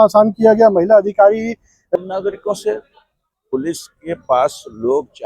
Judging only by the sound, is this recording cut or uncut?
cut